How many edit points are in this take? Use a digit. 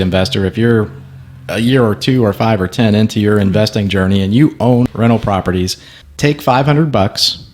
1